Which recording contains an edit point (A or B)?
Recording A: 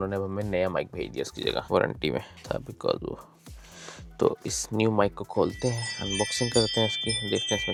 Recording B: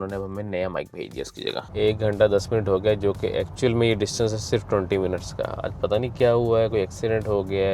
B